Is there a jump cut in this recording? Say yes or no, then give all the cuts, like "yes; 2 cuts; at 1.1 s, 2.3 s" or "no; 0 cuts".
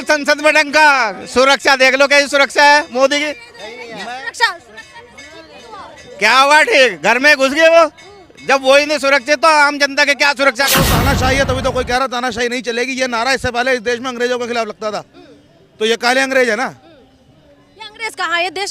yes; 1 cut; at 10.7 s